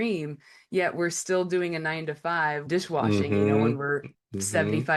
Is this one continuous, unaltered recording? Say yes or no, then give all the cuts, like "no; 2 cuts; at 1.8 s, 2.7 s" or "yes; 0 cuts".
yes; 0 cuts